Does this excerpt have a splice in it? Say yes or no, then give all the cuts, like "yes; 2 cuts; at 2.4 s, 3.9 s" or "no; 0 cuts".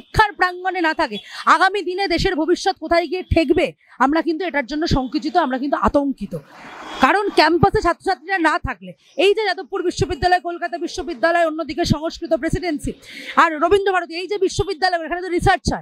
no; 0 cuts